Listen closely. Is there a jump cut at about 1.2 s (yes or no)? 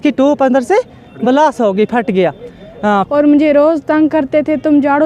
no